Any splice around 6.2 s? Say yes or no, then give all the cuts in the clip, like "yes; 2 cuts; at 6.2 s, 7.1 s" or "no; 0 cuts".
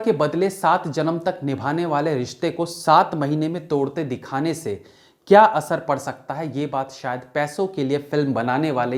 no; 0 cuts